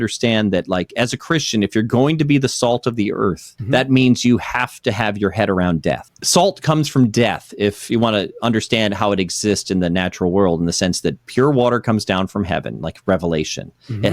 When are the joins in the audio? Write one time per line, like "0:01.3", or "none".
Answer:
0:03.5
0:06.1